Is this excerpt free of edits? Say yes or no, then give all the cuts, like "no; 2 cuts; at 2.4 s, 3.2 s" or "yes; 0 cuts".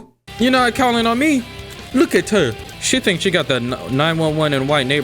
no; 1 cut; at 2.6 s